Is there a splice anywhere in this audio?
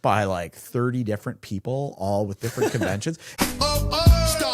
yes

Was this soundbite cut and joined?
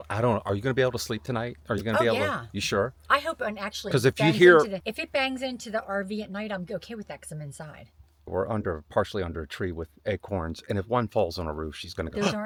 no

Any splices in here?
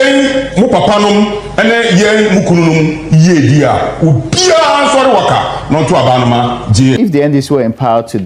yes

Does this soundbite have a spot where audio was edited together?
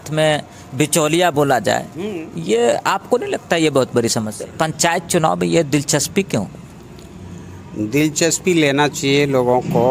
yes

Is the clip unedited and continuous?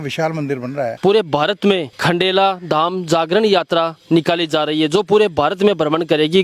no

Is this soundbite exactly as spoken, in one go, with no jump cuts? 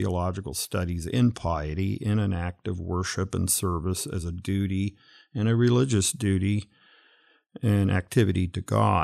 yes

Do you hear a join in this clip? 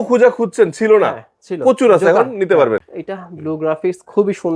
yes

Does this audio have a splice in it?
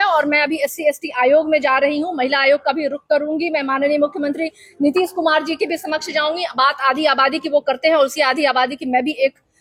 no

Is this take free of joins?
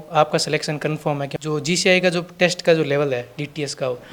no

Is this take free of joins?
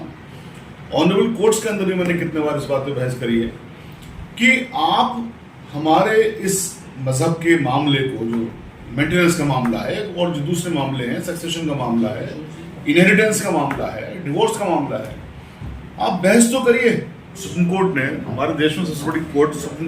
no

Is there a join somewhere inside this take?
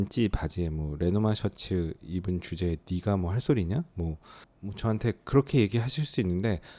no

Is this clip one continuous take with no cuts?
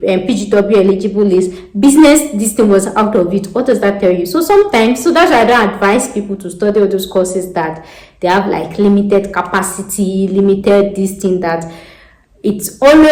yes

